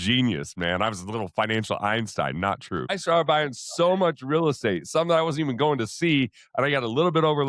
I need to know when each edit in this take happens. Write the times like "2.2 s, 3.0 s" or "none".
3.0 s

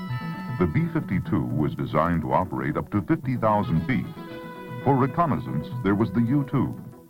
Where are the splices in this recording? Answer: 4.3 s

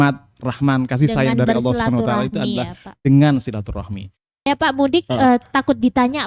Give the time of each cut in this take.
4.5 s

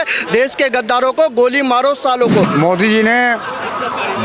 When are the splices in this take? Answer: 2.5 s

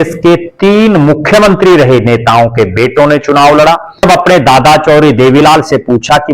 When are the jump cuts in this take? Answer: 4.0 s

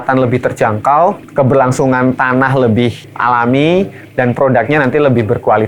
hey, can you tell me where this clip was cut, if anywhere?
1.2 s, 3.1 s

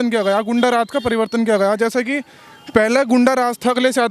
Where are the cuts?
none

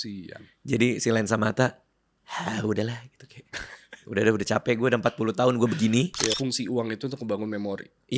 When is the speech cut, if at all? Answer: 6.3 s

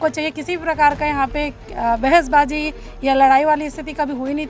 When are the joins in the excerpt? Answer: none

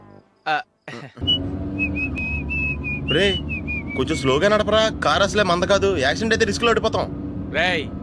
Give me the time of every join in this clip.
1.2 s

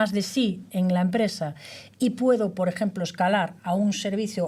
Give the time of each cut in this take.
none

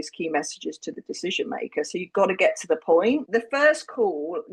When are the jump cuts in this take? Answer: 3.2 s

